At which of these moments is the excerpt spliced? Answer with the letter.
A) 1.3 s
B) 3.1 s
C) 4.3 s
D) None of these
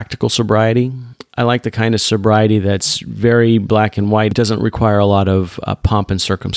C